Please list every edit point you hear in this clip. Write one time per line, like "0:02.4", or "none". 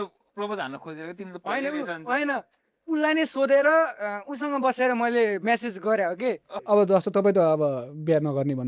0:06.6